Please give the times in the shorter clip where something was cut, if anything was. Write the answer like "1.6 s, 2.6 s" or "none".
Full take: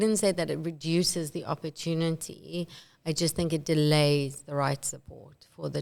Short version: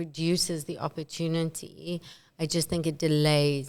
none